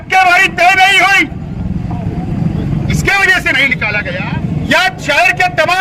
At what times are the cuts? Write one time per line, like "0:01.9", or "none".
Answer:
0:04.0